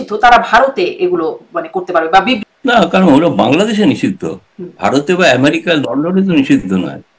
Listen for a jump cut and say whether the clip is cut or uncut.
cut